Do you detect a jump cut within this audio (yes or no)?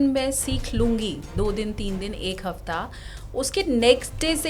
no